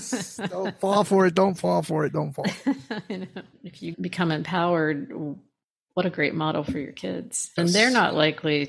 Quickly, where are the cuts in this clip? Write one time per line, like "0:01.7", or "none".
0:03.9
0:07.6